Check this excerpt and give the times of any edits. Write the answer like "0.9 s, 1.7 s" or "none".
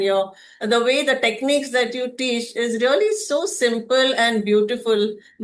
none